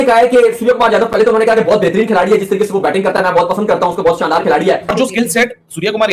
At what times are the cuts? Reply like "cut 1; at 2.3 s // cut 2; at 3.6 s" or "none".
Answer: cut 1; at 4.9 s